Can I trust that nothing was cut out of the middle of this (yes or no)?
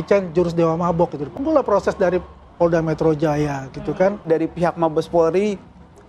no